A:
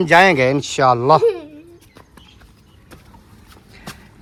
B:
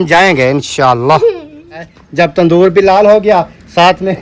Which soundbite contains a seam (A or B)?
B